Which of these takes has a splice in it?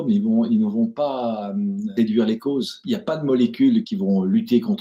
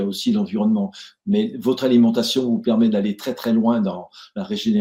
first; 3 cuts; at 1.9 s, 2.8 s, 3.9 s

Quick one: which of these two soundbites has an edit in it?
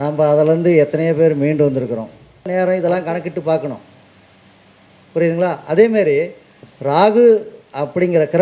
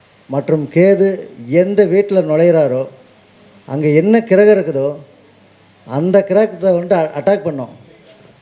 first; 1 cut; at 2.5 s

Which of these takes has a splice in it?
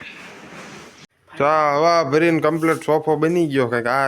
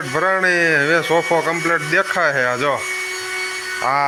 first; 1 cut; at 1.1 s

